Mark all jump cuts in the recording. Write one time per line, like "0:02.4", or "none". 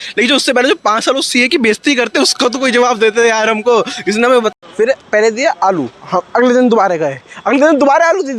0:04.5